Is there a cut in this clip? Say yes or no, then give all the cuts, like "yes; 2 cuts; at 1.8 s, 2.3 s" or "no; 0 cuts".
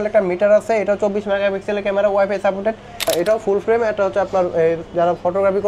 yes; 1 cut; at 3.1 s